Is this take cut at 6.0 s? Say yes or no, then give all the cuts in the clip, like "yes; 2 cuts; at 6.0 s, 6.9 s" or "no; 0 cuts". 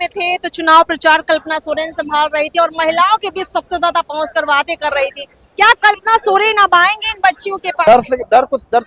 no; 1 cut; at 7.8 s